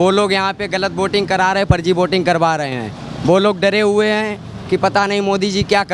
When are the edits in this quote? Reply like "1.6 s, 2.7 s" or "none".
none